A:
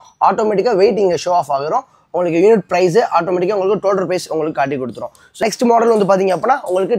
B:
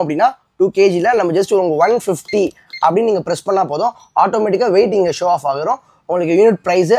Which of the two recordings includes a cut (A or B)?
A